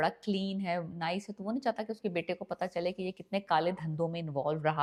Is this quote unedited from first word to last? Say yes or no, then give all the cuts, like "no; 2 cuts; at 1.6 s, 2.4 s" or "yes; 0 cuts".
yes; 0 cuts